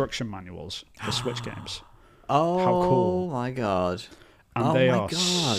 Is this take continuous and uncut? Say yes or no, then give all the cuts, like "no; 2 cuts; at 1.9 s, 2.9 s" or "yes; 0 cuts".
yes; 0 cuts